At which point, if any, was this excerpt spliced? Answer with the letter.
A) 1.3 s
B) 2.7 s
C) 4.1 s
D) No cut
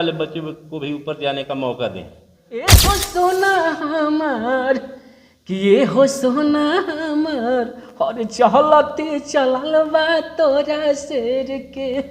B